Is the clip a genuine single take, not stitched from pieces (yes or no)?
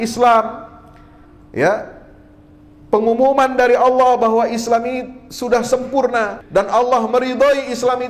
no